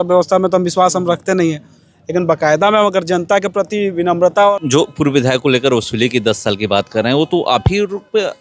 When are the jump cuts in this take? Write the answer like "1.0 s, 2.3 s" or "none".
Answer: 4.6 s